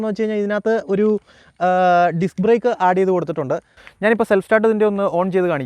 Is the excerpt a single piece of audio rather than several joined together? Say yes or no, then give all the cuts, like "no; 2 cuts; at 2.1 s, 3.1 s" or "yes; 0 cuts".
no; 1 cut; at 3.8 s